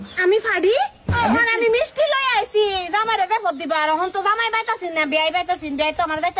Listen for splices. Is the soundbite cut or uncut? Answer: cut